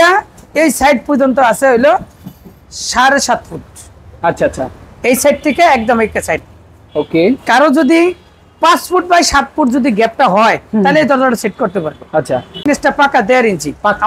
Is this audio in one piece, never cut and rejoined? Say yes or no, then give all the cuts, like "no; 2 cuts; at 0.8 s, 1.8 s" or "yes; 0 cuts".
no; 1 cut; at 12.6 s